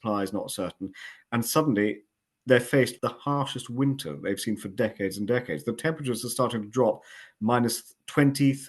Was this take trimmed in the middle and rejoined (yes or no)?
yes